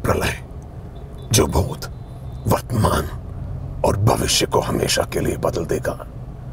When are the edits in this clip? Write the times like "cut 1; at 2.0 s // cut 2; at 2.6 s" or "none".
none